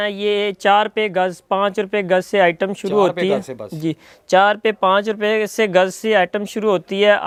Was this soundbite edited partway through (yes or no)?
no